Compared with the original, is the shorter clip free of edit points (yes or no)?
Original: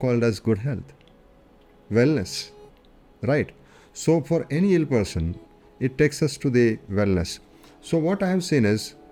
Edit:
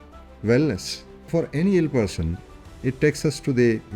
no